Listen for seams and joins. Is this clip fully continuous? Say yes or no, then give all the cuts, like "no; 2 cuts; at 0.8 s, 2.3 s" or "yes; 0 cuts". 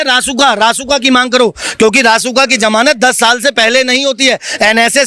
yes; 0 cuts